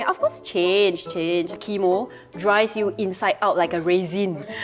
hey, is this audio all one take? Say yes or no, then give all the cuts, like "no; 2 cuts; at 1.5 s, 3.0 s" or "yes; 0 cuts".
yes; 0 cuts